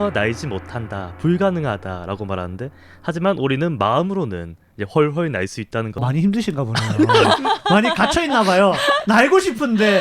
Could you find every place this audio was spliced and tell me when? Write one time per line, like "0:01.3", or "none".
0:06.0